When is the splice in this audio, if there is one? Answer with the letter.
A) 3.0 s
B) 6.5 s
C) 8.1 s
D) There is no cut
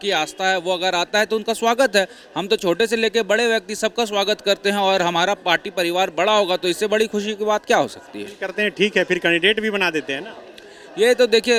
D